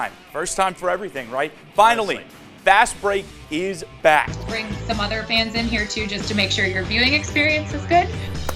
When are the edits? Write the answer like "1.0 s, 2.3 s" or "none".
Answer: 4.4 s